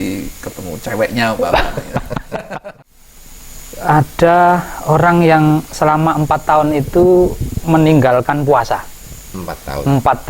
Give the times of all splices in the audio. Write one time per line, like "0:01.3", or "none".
0:02.5